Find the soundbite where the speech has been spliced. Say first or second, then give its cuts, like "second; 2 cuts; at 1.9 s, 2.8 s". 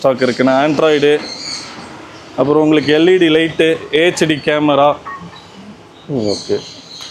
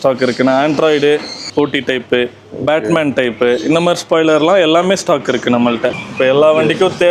second; 2 cuts; at 1.5 s, 6.0 s